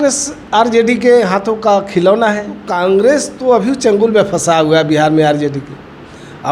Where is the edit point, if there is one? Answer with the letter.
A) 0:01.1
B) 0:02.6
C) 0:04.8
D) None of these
B